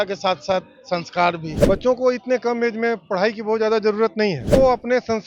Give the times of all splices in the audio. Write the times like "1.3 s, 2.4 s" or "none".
1.5 s, 4.5 s